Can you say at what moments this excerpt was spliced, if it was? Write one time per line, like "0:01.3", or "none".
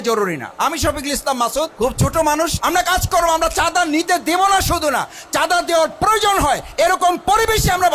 0:01.7
0:02.6